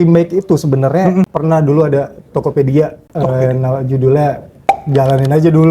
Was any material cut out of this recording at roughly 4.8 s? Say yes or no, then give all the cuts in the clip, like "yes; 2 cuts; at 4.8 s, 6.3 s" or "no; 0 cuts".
yes; 3 cuts; at 1.3 s, 3.0 s, 4.8 s